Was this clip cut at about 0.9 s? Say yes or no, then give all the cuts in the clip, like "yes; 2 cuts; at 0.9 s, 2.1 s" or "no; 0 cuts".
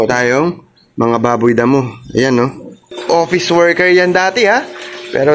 no; 1 cut; at 2.9 s